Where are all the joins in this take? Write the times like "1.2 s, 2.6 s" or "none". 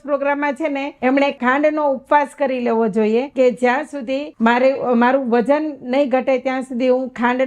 1.2 s, 3.3 s, 4.3 s